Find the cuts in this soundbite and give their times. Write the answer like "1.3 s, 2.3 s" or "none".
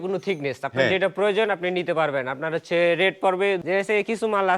3.6 s